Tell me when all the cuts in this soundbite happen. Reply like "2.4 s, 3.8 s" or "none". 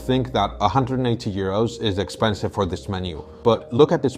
3.2 s